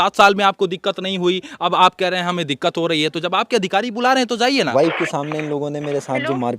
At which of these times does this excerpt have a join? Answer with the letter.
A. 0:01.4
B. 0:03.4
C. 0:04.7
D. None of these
C